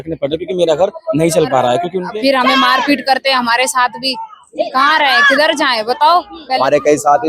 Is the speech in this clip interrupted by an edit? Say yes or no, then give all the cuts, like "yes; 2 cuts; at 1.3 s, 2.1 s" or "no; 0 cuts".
yes; 2 cuts; at 2.0 s, 6.4 s